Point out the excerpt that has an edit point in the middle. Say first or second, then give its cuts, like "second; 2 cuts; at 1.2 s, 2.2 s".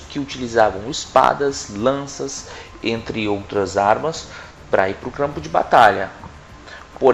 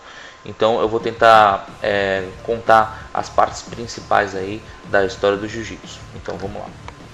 first; 1 cut; at 1.6 s